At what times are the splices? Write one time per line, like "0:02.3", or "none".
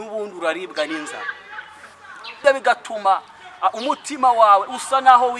0:02.3